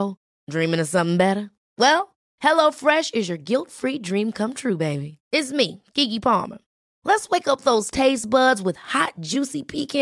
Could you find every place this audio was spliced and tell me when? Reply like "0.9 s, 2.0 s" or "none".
none